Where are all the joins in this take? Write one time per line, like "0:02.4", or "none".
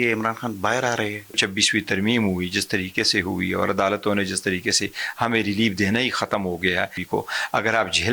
0:01.4
0:07.0